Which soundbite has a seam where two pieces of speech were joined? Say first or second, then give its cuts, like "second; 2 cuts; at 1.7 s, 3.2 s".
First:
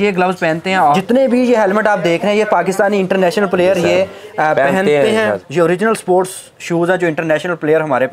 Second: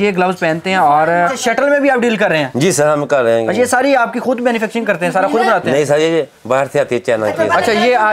first; 2 cuts; at 1.0 s, 5.4 s